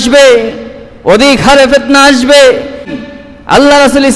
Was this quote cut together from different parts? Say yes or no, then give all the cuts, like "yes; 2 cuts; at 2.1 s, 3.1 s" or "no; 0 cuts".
yes; 1 cut; at 2.9 s